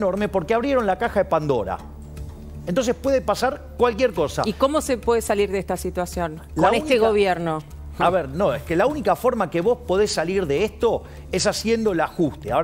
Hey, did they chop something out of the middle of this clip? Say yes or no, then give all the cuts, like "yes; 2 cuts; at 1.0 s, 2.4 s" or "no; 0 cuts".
no; 0 cuts